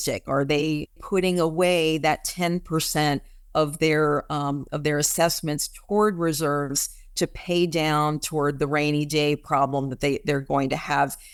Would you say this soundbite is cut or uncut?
uncut